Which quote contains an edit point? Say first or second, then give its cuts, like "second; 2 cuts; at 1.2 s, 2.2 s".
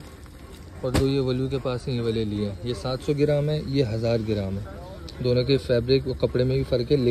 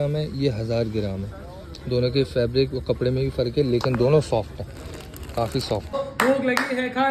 second; 1 cut; at 6.0 s